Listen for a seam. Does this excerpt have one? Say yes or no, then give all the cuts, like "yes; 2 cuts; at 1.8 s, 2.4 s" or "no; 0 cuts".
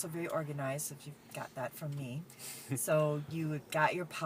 no; 0 cuts